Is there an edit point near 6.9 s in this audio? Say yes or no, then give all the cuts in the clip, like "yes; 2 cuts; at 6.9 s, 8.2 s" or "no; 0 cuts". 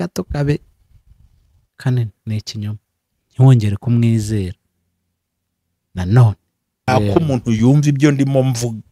yes; 1 cut; at 6.9 s